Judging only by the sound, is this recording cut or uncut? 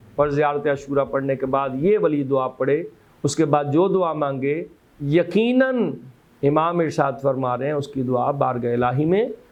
uncut